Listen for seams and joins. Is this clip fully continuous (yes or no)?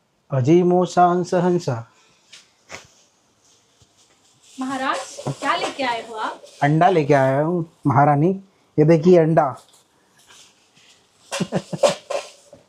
yes